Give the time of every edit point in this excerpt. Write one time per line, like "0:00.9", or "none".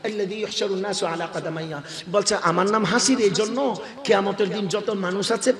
none